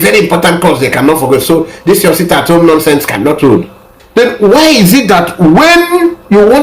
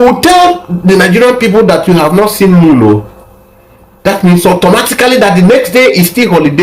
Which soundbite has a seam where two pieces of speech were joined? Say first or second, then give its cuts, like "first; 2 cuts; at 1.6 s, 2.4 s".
first; 1 cut; at 4.0 s